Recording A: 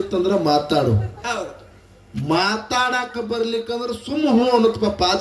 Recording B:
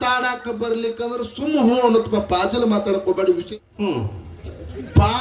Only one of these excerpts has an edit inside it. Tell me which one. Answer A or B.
B